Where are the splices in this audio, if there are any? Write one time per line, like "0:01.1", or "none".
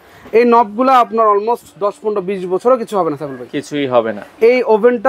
none